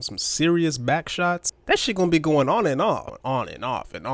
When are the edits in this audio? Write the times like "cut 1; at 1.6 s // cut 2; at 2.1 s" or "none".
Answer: cut 1; at 1.5 s // cut 2; at 3.1 s